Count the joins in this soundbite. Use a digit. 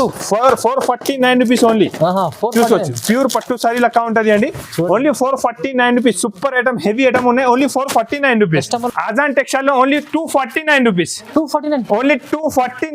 1